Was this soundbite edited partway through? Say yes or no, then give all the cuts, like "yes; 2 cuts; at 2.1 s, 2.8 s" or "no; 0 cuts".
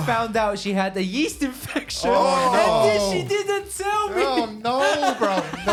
no; 0 cuts